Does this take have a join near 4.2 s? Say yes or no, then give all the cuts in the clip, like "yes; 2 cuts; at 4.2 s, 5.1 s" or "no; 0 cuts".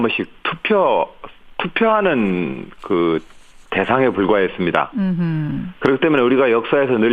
no; 0 cuts